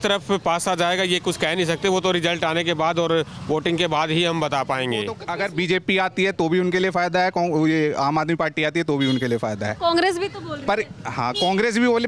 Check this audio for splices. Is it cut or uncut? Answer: cut